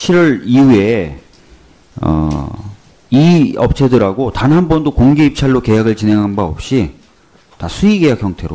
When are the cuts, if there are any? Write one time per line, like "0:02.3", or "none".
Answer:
0:06.0